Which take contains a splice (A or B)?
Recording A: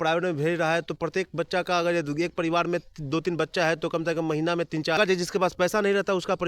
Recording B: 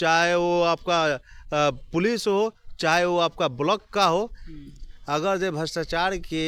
A